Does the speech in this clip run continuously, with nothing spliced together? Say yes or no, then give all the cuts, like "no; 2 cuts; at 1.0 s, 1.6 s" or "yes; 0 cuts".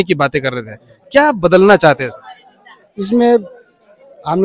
yes; 0 cuts